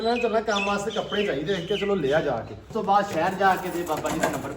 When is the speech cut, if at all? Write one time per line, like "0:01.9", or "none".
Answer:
0:02.7